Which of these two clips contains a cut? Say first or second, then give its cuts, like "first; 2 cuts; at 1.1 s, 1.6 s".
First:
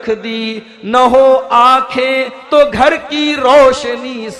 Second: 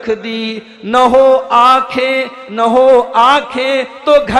first; 1 cut; at 2.4 s